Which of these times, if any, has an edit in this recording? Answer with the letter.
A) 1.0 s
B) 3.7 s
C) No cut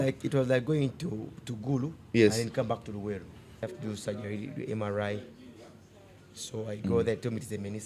B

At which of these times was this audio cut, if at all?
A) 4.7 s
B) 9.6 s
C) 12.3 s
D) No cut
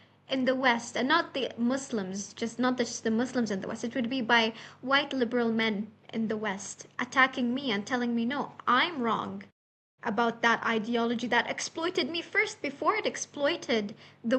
D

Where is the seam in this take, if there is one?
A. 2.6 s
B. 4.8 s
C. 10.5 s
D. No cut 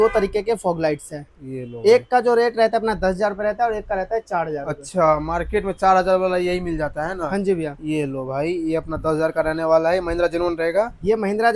D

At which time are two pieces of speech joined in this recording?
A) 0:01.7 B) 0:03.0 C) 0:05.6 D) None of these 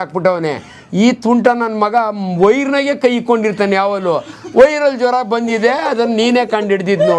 D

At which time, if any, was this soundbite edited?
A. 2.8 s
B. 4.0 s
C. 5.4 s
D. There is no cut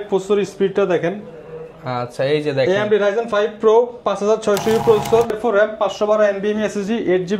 C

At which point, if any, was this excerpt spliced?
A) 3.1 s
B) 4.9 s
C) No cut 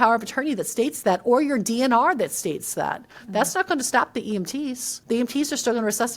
B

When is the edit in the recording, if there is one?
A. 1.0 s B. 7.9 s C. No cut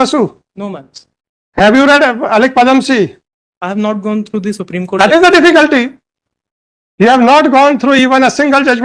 C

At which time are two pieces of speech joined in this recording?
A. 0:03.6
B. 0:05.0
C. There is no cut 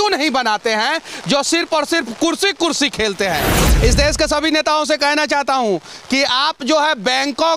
A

